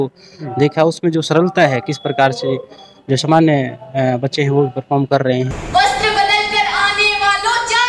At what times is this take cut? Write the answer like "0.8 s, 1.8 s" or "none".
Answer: 5.6 s